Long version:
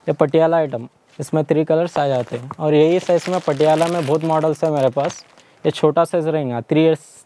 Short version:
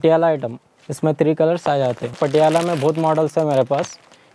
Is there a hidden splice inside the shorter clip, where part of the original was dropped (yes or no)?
yes